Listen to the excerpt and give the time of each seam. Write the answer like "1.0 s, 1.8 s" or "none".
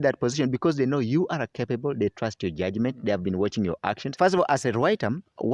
4.1 s